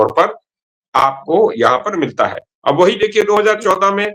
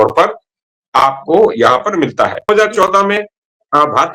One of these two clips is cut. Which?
second; 1 cut; at 2.5 s

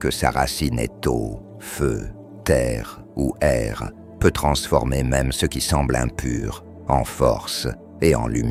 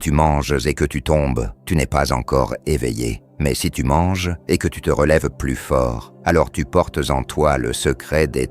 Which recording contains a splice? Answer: second; 4 cuts; at 1.5 s, 3.2 s, 4.3 s, 6.1 s

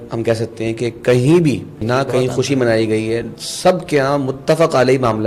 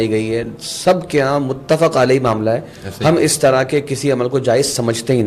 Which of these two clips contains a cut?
first; 1 cut; at 1.8 s

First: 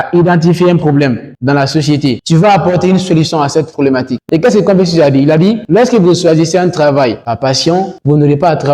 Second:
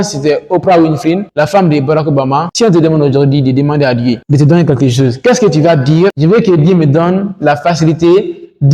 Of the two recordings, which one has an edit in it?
first; 2 cuts; at 2.2 s, 4.2 s

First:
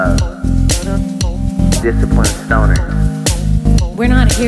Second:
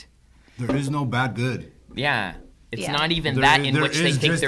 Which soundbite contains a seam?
first; 1 cut; at 1.8 s

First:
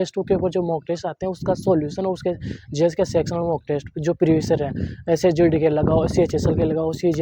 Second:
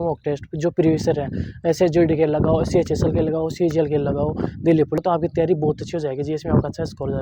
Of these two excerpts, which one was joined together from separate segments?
second; 1 cut; at 5.0 s

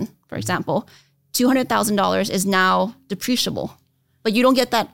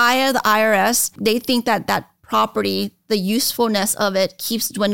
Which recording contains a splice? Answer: second; 1 cut; at 1.2 s

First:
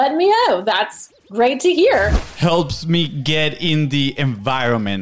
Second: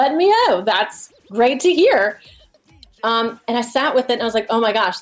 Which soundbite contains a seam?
first; 1 cut; at 2.2 s

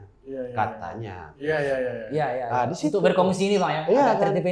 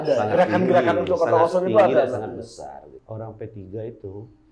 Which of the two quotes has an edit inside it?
second; 1 cut; at 3.0 s

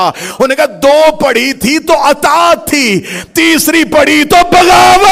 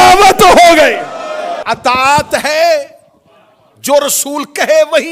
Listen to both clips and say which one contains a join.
second; 1 cut; at 1.6 s

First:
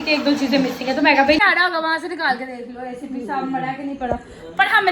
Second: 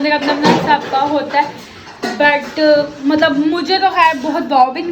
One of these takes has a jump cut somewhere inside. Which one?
first; 1 cut; at 1.4 s

